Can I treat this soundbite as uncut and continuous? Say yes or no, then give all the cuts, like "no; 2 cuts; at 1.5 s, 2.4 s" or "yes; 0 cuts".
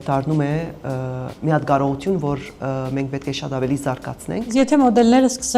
no; 1 cut; at 4.5 s